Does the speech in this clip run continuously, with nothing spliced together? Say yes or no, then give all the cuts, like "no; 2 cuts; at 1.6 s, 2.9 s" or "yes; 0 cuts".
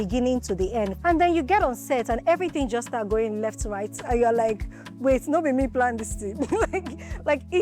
no; 1 cut; at 0.9 s